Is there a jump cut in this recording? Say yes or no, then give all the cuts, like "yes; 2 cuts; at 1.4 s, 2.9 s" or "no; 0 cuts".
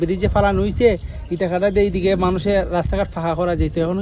no; 0 cuts